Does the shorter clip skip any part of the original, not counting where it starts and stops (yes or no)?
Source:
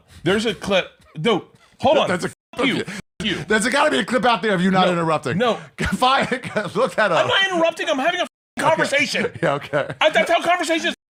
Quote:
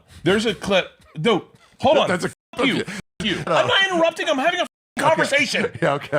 yes